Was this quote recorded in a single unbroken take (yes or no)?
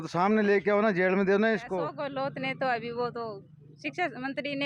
no